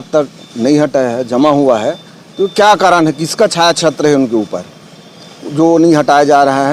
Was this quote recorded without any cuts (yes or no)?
yes